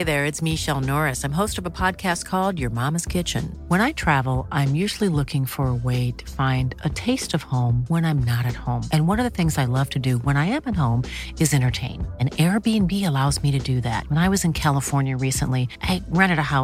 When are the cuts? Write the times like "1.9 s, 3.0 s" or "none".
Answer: none